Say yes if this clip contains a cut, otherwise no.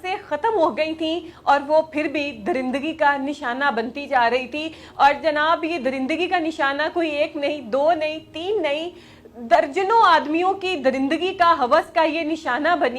no